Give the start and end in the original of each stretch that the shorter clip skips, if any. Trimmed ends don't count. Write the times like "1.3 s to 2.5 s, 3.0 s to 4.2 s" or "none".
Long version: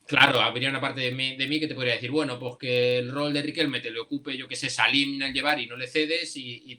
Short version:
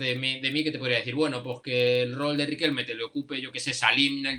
none